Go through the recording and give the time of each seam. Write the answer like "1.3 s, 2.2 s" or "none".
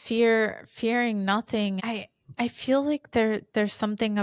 1.8 s

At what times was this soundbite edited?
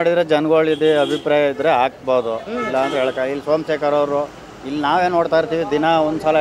none

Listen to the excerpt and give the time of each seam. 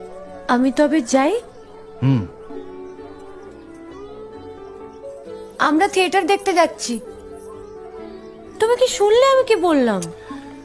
none

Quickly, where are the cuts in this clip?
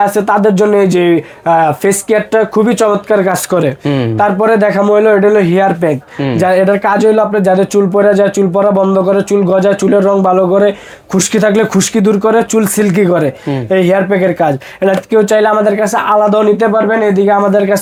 none

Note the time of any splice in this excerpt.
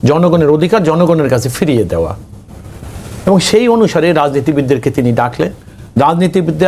none

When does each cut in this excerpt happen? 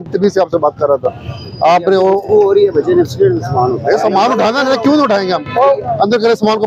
none

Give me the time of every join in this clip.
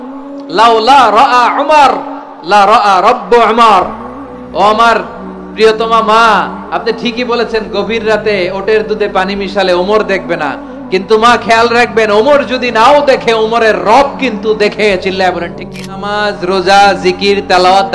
15.9 s

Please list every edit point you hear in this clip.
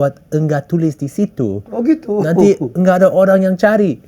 none

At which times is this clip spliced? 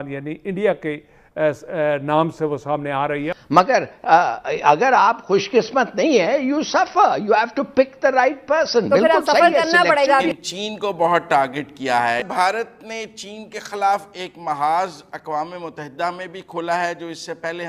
3.3 s, 10.3 s, 12.3 s

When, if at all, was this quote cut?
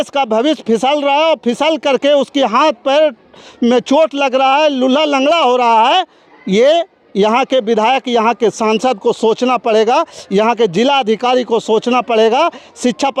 none

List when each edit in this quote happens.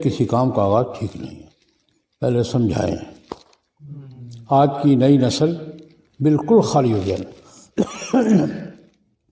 none

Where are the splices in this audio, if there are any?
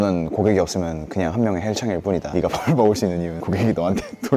none

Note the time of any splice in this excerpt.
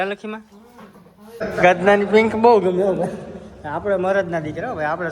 1.4 s

